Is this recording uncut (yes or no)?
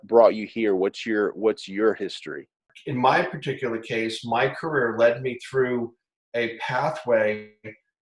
no